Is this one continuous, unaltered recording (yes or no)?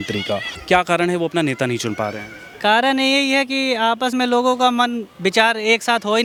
yes